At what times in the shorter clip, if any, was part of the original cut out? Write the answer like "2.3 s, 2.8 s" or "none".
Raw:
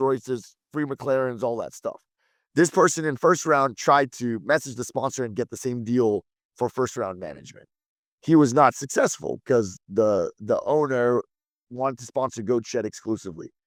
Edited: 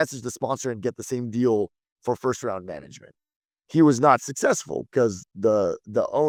none